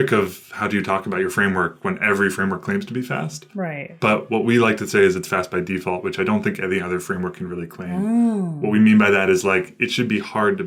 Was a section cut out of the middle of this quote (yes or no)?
no